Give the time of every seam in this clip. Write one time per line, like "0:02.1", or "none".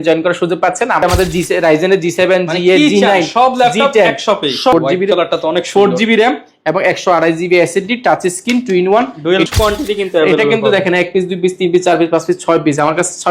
0:01.0
0:04.7
0:09.5

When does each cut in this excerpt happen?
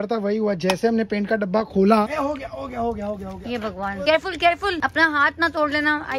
0:02.1
0:04.0
0:04.8

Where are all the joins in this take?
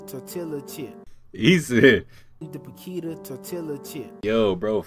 none

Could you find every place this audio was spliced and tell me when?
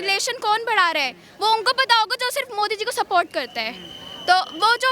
none

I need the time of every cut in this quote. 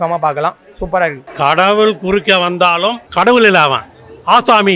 0:01.2
0:03.0

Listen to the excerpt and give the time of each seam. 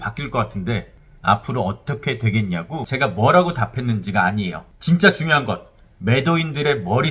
0:02.8

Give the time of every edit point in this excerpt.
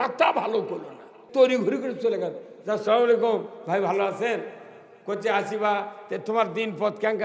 0:01.2

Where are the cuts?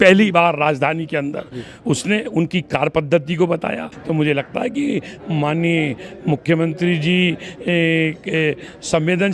0:03.9

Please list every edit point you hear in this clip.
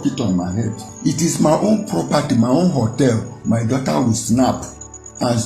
0:00.9

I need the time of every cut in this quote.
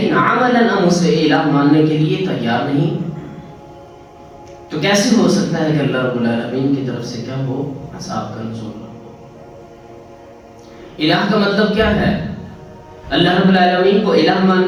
none

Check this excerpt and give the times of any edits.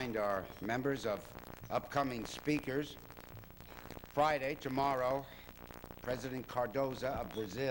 0:04.2

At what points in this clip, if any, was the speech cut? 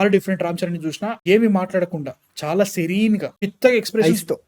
0:01.2

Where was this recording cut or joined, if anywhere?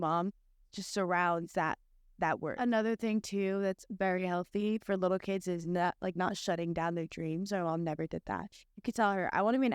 0:02.5

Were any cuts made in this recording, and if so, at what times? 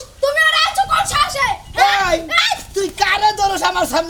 none

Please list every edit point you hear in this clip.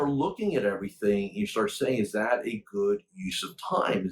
none

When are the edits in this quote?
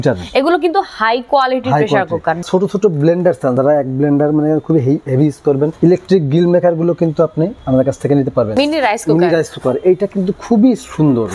0:02.4
0:03.6
0:05.7
0:07.6
0:08.5

